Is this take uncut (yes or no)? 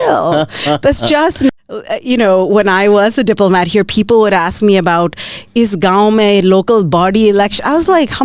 no